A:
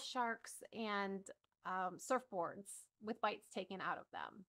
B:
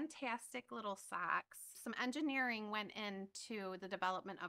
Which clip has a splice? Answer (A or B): B